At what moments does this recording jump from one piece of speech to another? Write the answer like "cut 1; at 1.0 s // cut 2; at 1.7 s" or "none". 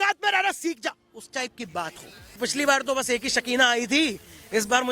cut 1; at 2.4 s